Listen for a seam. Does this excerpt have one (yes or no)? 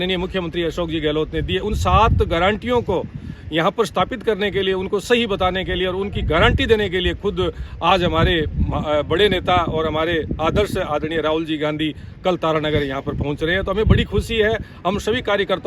no